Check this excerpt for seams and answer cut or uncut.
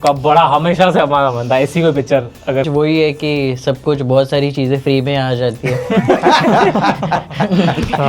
cut